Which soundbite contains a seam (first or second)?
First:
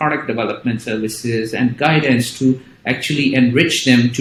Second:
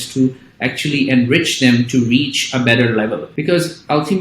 second